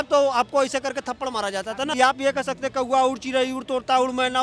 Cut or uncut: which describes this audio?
cut